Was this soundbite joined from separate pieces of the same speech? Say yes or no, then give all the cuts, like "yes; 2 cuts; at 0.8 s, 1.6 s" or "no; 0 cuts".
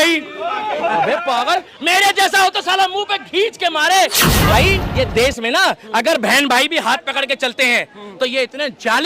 yes; 1 cut; at 4.5 s